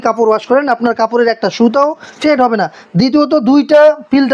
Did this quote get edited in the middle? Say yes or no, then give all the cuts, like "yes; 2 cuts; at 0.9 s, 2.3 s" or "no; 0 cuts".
no; 0 cuts